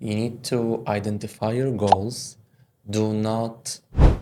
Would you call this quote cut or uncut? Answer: uncut